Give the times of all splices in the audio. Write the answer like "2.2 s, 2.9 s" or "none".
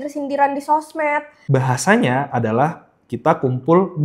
1.3 s

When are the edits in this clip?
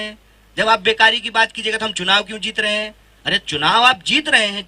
none

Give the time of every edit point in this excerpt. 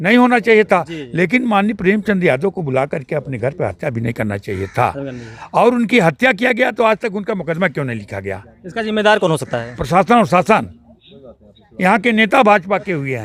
none

